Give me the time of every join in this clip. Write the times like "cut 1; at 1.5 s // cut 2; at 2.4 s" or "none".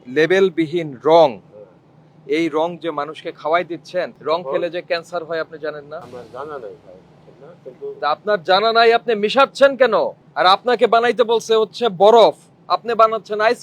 cut 1; at 6.1 s // cut 2; at 10.2 s